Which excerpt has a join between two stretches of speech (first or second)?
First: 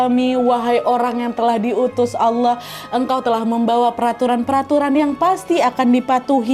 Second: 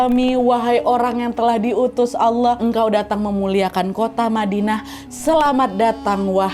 second